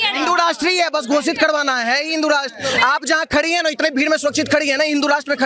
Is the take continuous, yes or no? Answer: yes